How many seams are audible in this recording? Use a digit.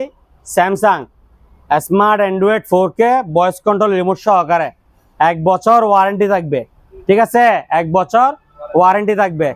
0